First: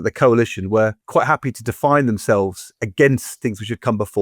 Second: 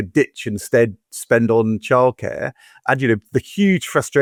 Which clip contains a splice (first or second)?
first